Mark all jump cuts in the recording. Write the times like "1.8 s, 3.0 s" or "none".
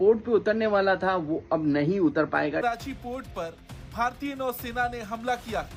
none